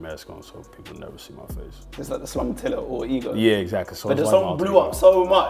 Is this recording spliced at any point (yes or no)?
no